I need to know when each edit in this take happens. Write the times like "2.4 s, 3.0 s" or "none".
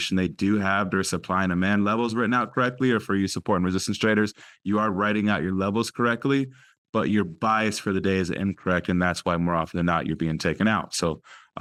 none